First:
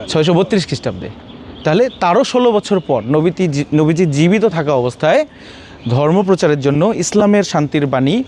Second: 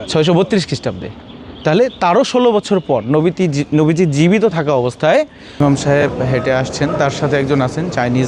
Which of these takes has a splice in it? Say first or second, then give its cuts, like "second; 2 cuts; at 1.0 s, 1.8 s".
second; 1 cut; at 5.6 s